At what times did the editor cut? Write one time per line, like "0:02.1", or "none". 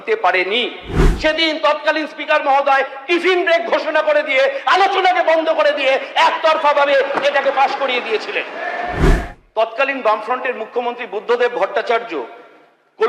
0:01.1
0:09.1